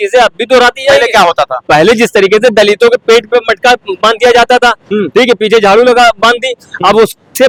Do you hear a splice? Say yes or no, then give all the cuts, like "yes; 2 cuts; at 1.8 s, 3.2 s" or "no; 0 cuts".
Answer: no; 0 cuts